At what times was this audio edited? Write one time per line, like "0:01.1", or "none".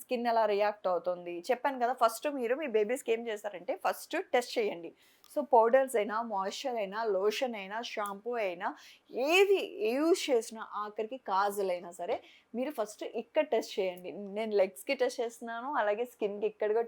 none